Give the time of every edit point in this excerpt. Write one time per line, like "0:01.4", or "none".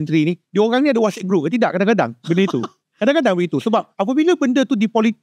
none